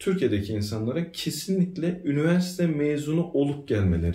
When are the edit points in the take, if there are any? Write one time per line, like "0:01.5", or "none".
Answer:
none

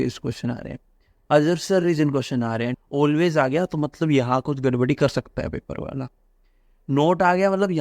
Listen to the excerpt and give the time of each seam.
0:02.8

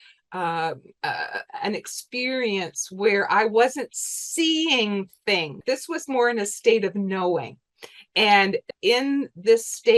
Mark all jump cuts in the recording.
0:05.6
0:08.7

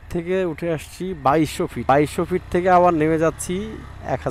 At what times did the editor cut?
0:01.8

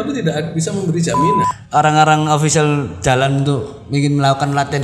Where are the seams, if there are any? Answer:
0:01.6

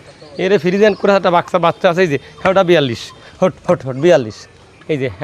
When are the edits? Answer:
none

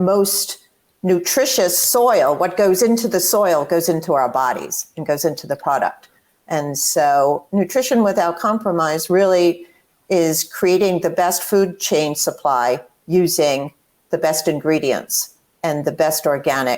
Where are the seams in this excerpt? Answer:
none

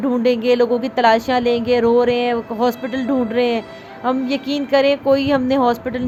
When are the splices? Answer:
none

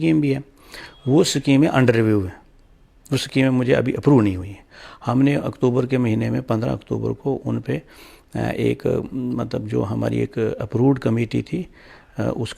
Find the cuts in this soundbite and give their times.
none

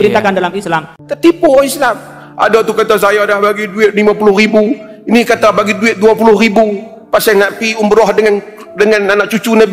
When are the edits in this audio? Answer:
0:01.0

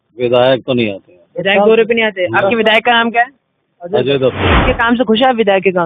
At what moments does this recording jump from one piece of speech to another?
0:04.5

